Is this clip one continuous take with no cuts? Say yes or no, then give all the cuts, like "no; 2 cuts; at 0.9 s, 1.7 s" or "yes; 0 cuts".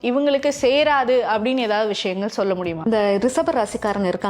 no; 1 cut; at 2.8 s